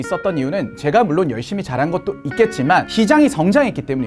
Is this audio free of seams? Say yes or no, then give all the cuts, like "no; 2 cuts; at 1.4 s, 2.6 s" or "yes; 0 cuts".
yes; 0 cuts